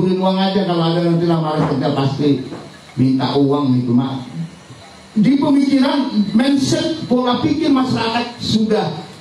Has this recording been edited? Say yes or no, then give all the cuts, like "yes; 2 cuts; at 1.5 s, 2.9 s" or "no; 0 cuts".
no; 0 cuts